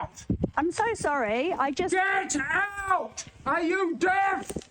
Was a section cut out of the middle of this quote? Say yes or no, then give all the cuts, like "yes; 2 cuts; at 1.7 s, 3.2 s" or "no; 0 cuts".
yes; 1 cut; at 3.2 s